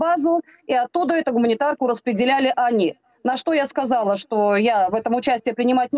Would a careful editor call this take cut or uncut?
uncut